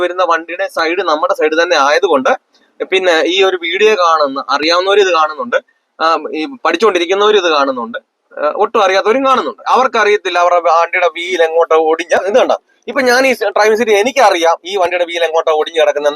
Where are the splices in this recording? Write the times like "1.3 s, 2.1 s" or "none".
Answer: 9.6 s, 12.3 s